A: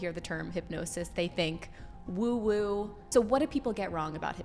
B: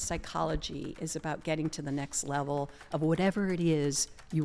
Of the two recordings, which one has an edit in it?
A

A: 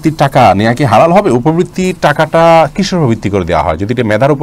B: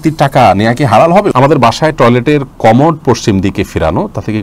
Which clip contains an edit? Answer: B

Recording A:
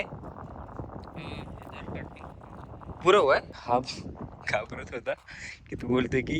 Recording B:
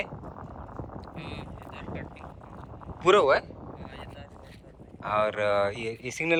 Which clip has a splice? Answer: A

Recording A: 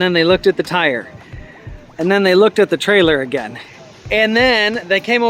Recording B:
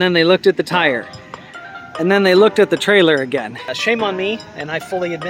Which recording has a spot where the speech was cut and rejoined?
B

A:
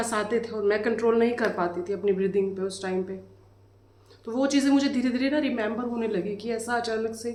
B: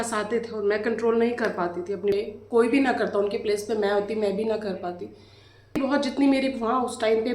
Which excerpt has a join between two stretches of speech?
B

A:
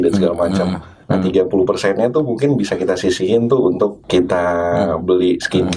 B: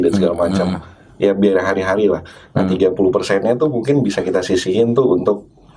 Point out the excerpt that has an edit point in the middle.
A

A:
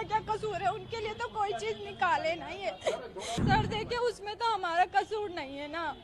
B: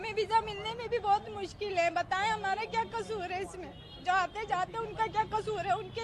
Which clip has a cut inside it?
A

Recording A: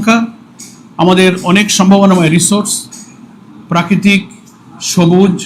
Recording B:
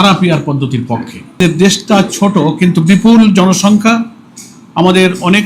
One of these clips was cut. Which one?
B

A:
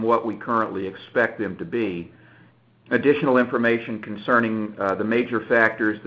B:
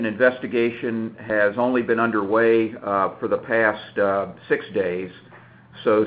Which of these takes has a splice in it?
A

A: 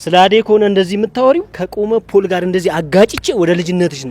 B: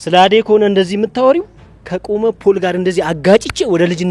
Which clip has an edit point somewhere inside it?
A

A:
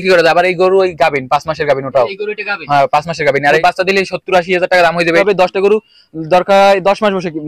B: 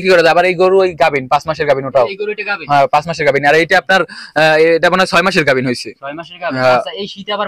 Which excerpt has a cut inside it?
A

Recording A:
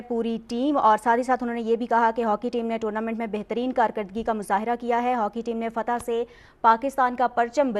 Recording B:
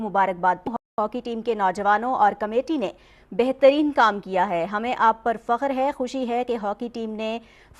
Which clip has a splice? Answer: B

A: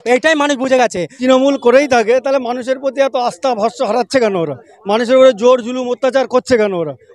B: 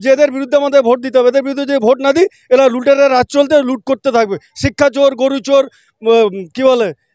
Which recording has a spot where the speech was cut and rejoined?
A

